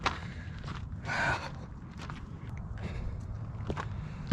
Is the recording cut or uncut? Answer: cut